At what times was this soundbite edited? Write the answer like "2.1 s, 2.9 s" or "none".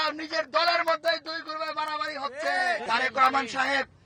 2.8 s

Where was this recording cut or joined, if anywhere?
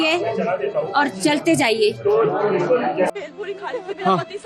3.1 s

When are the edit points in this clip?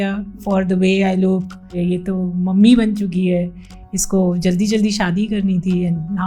1.8 s

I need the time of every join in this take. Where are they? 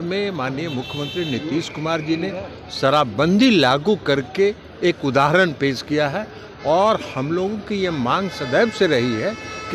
none

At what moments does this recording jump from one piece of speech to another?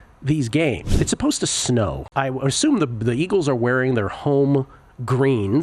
1.0 s, 2.0 s

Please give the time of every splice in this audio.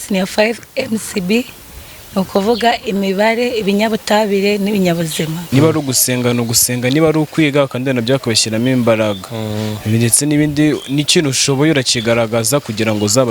5.4 s

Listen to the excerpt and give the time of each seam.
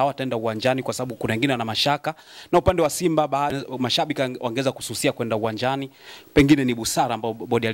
4.0 s

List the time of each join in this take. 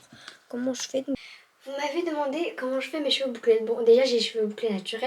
1.2 s

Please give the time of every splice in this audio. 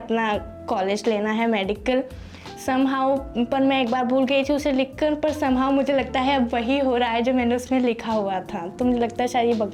none

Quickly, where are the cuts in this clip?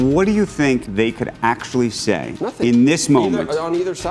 0.9 s, 2.4 s

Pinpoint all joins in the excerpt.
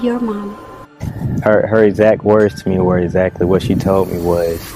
1.3 s

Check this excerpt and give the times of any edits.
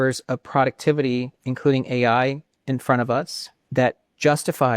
3.6 s

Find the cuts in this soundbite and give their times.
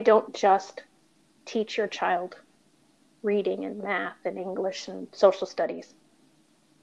none

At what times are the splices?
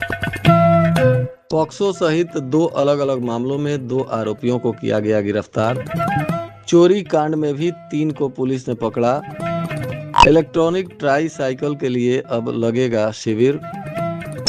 1.3 s

